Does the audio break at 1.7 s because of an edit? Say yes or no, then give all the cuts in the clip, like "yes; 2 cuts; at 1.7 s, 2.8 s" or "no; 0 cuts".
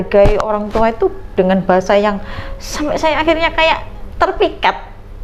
no; 0 cuts